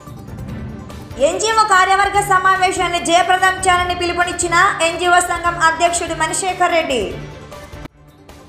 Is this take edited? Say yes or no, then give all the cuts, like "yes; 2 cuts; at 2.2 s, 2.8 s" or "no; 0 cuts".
no; 0 cuts